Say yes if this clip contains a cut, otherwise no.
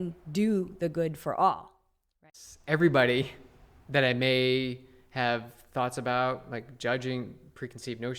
yes